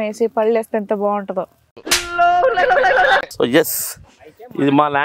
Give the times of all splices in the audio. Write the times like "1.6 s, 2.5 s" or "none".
3.3 s